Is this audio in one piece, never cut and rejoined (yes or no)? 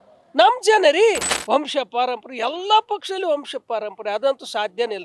no